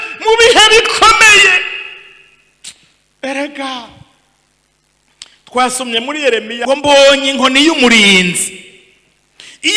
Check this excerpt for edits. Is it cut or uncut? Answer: cut